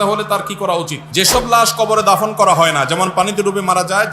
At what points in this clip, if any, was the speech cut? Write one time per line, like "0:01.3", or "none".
0:01.0